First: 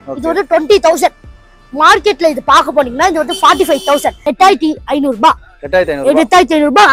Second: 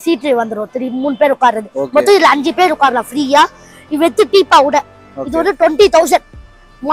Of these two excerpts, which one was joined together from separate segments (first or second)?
first